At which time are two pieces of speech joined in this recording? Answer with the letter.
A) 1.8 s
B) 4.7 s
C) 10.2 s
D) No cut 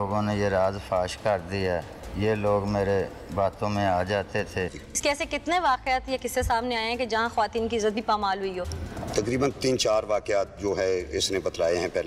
B